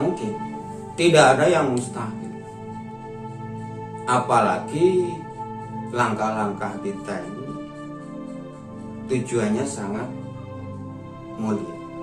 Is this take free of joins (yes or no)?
yes